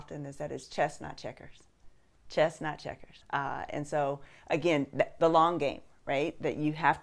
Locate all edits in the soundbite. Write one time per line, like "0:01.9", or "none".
0:02.1
0:03.5